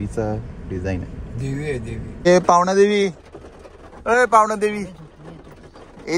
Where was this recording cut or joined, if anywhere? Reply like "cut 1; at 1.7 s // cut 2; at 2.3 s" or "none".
cut 1; at 2.2 s